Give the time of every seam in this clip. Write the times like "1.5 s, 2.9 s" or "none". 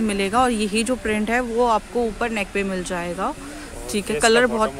none